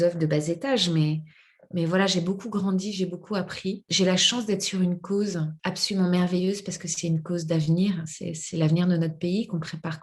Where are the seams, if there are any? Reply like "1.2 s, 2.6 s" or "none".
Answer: 3.9 s, 5.5 s